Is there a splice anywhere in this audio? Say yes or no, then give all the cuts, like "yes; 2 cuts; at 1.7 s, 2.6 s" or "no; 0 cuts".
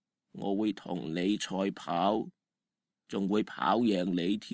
no; 0 cuts